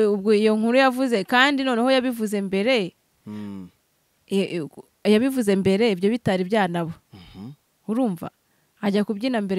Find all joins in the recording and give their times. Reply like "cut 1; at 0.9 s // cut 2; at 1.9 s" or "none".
none